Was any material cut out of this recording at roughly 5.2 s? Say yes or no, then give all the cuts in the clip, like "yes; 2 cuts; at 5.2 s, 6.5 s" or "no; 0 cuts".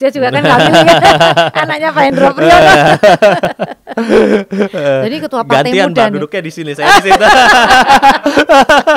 no; 1 cut; at 3.5 s